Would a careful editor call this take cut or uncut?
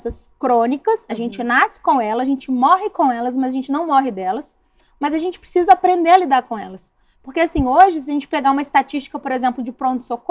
uncut